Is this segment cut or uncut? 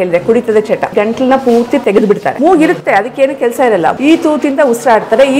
cut